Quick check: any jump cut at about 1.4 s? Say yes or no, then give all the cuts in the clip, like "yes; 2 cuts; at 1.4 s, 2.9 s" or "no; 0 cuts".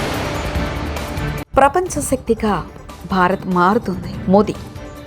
yes; 1 cut; at 1.4 s